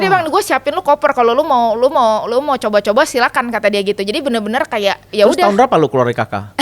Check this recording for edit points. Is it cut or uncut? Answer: cut